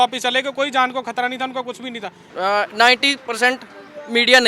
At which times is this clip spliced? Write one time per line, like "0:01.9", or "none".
0:02.2

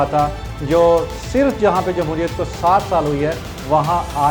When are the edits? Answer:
none

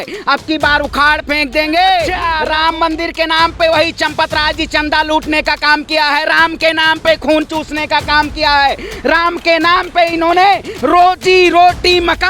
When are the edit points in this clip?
0:02.2

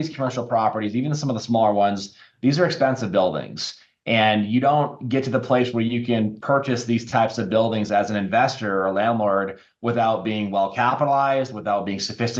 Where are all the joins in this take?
none

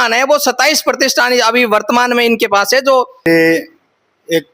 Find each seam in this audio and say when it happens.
0:03.2

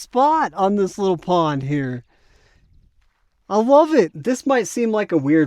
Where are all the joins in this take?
0:04.2

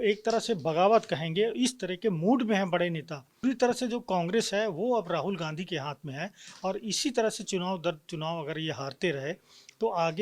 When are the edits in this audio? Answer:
0:03.4

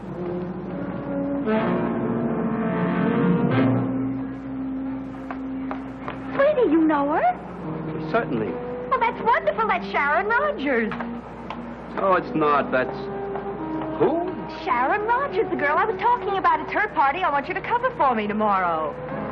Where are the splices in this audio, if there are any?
0:13.2

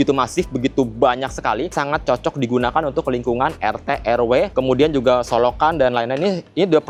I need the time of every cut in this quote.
none

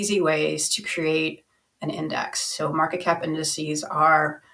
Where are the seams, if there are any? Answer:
none

